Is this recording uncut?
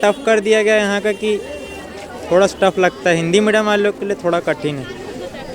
yes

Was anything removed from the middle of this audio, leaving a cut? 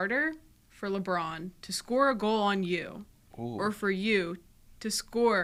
no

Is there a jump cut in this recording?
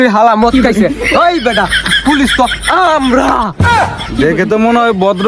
no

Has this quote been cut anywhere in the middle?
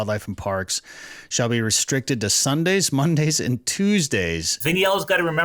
yes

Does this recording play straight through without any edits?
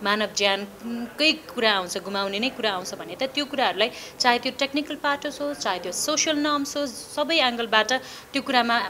yes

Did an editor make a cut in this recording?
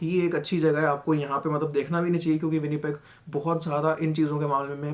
no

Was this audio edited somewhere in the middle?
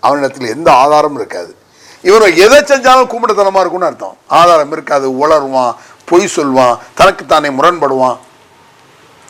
no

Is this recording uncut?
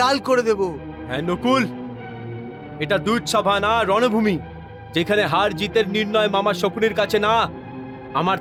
yes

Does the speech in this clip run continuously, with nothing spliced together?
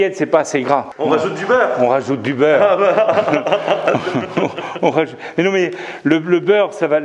no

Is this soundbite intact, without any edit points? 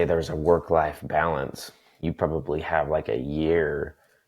no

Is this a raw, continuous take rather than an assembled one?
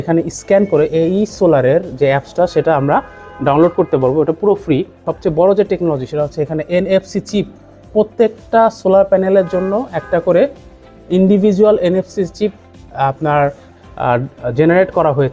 no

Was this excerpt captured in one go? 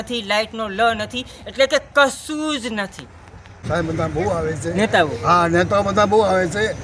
no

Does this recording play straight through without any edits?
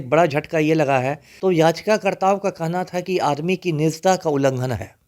no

